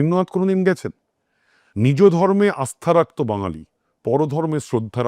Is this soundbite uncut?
yes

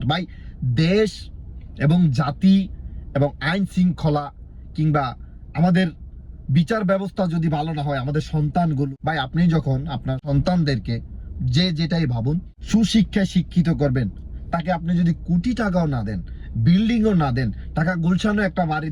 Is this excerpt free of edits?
no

